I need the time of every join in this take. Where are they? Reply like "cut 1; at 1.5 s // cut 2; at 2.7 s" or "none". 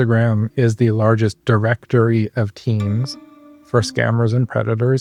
none